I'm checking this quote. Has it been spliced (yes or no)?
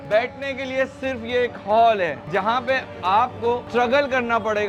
no